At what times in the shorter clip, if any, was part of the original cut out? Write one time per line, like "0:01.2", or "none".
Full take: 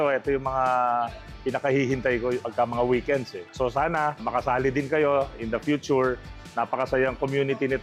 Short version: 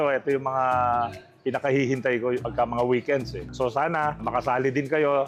none